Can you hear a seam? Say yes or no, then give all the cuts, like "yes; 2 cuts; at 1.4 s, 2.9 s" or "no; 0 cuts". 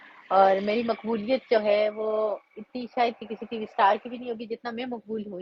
no; 0 cuts